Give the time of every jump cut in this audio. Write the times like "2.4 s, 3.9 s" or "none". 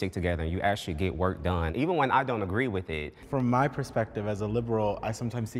1.7 s, 3.2 s